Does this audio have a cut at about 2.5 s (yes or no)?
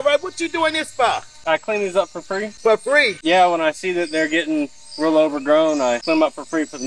yes